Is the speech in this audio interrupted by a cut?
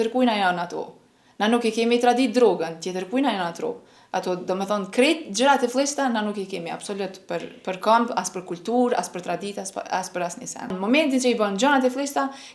yes; 1 cut; at 10.7 s

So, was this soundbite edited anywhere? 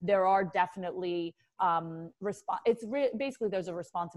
no; 0 cuts

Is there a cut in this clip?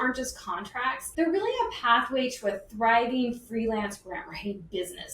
yes; 1 cut; at 1.0 s

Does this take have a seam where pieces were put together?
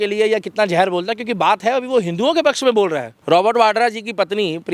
yes; 1 cut; at 3.1 s

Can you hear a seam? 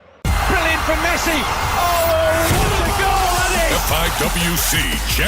yes; 1 cut; at 1.7 s

